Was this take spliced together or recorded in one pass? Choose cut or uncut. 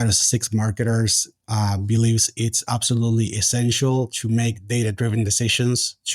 uncut